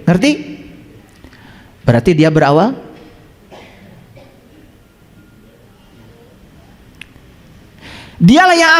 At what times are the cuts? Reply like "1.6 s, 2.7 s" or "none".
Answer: none